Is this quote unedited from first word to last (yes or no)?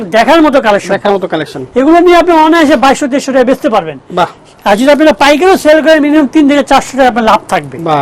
yes